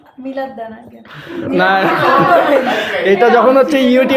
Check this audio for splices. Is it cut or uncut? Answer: uncut